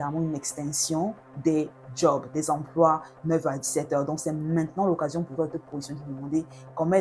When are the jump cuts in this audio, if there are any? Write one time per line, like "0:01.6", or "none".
none